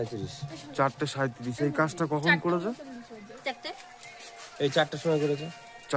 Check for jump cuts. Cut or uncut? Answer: uncut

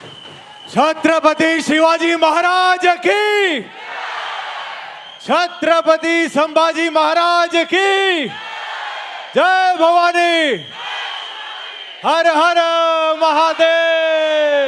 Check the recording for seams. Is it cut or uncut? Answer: uncut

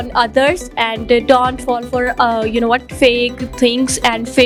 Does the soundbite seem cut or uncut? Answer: uncut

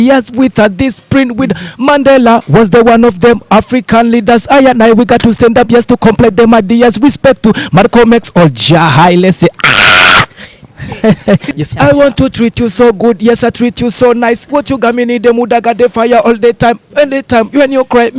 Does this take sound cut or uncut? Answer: cut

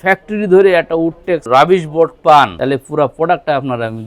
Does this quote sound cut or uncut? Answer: cut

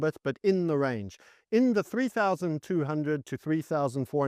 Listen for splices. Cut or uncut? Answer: uncut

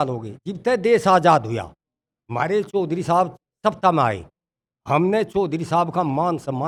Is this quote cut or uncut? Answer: uncut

